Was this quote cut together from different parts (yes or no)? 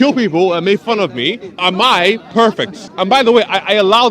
yes